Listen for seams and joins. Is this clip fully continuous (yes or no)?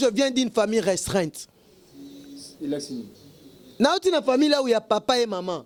yes